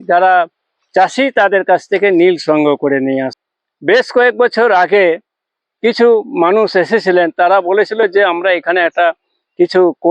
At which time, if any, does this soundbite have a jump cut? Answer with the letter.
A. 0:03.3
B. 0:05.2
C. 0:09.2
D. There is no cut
A